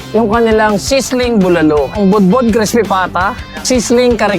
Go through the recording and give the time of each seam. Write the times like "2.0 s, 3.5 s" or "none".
2.0 s, 3.5 s